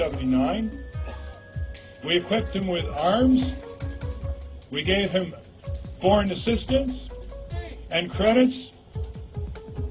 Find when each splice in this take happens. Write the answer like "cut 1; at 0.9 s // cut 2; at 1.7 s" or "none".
cut 1; at 5.5 s